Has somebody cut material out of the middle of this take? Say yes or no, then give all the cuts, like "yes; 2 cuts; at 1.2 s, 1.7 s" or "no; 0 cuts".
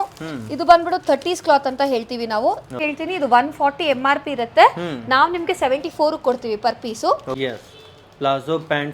yes; 2 cuts; at 2.8 s, 7.3 s